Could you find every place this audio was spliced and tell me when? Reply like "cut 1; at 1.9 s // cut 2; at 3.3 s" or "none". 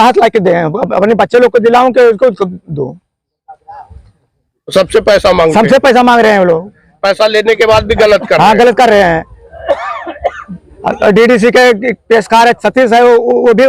none